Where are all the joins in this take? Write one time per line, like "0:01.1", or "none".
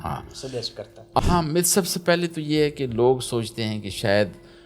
0:01.2